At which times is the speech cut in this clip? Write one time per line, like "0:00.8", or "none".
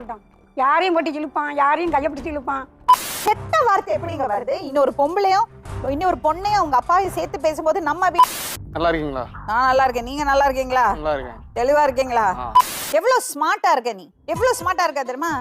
0:02.8
0:08.4
0:12.8

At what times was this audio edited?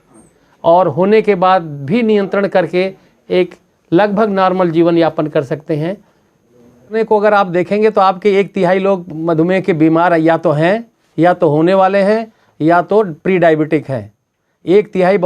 0:06.9

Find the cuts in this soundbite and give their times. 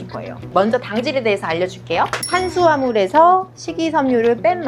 0:02.3

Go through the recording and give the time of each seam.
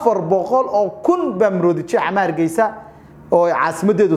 none

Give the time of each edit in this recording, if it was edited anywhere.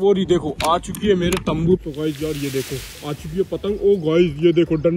0:01.8

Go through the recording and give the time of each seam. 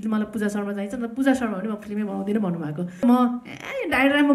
0:03.0

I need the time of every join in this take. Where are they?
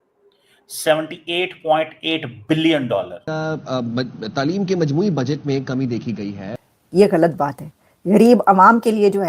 0:03.2
0:06.5

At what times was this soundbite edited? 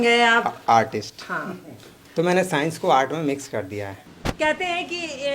0:04.0

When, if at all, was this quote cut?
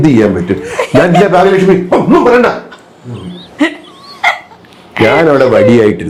none

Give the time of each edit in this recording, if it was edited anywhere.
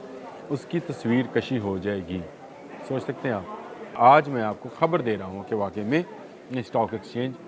0:03.9

